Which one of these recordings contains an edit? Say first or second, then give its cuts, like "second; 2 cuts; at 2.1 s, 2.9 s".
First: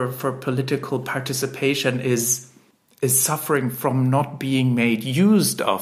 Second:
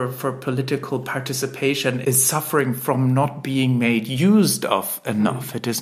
second; 1 cut; at 2.0 s